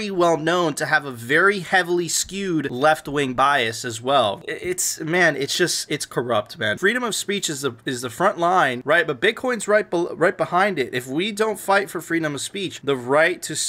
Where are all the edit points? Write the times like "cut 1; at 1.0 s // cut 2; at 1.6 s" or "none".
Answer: cut 1; at 4.4 s // cut 2; at 6.8 s